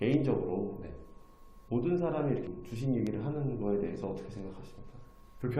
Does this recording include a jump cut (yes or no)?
no